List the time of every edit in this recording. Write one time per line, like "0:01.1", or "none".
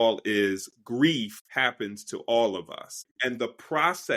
0:01.4
0:03.1